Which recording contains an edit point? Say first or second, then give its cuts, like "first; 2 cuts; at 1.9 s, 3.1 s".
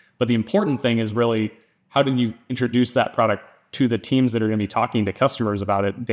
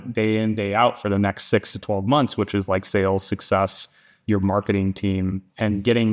first; 1 cut; at 2.4 s